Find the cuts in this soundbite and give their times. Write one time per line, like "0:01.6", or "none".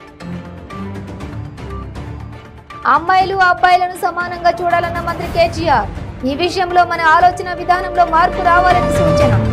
0:01.0